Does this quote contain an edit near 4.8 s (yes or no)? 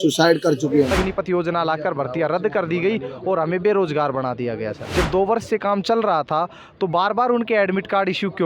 yes